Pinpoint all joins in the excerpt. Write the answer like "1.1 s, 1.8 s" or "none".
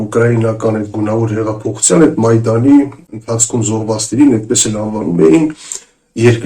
3.1 s